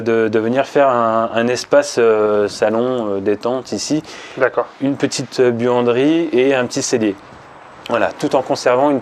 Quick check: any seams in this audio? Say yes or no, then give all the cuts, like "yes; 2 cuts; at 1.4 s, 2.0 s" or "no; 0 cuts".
no; 0 cuts